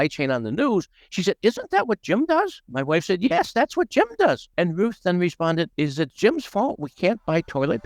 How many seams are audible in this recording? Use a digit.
3